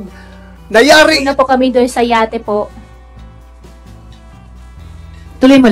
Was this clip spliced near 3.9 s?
no; 1 cut; at 1.2 s

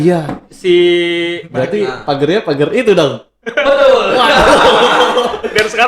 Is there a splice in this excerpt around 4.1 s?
no; 1 cut; at 1.4 s

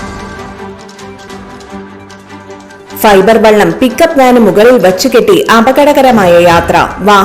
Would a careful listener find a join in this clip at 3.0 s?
yes; 2 cuts; at 1.3 s, 3.0 s

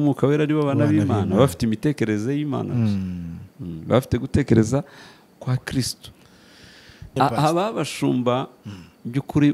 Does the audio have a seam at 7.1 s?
yes; 1 cut; at 7.1 s

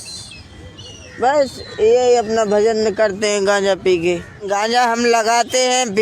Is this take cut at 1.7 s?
no; 1 cut; at 4.5 s

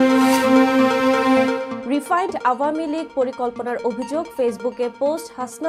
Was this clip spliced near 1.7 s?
yes; 1 cut; at 1.7 s

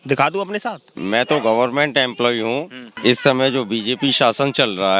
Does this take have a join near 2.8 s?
yes; 2 cuts; at 0.9 s, 2.8 s

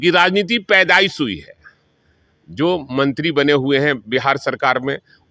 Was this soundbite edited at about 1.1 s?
no; 0 cuts

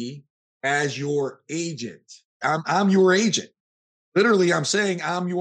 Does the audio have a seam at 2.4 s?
yes; 1 cut; at 2.4 s

